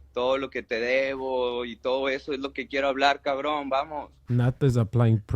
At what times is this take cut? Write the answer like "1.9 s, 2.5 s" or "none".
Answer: 4.1 s